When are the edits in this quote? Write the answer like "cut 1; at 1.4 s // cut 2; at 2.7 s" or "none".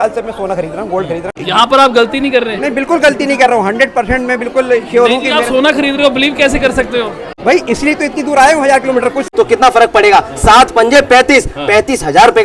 cut 1; at 1.3 s // cut 2; at 7.2 s // cut 3; at 9.2 s